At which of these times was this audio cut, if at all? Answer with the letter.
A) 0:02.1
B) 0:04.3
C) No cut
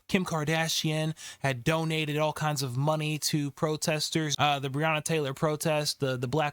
B